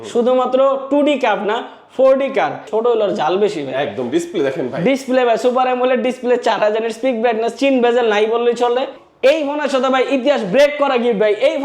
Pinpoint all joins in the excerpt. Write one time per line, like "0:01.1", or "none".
0:02.6
0:09.0